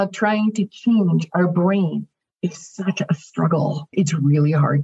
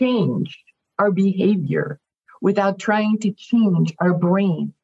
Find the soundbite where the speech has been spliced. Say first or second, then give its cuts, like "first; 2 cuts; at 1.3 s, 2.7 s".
first; 1 cut; at 3.9 s